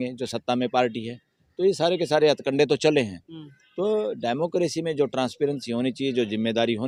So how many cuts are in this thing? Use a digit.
0